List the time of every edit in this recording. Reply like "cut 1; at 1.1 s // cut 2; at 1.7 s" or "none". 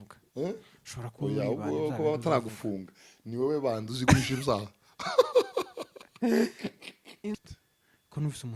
cut 1; at 7.4 s